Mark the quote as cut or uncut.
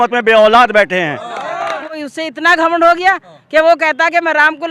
cut